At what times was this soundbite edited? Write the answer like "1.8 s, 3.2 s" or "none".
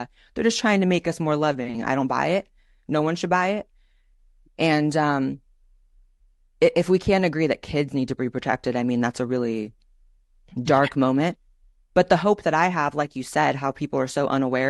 none